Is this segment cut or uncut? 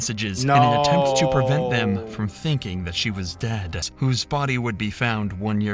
cut